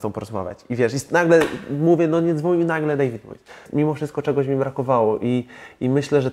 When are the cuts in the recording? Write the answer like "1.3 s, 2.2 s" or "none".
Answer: 3.6 s